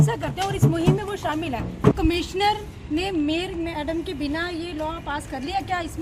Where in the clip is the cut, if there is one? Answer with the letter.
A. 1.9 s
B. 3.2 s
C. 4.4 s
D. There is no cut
A